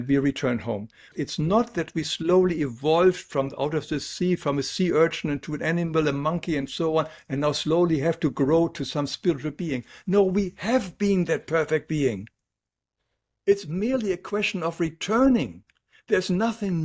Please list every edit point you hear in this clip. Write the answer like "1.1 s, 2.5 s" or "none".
1.1 s